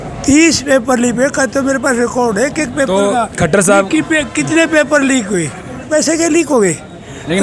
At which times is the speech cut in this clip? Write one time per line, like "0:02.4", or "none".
0:05.9